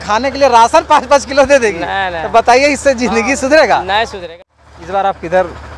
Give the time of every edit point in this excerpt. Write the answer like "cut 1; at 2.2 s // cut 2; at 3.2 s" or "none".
cut 1; at 4.2 s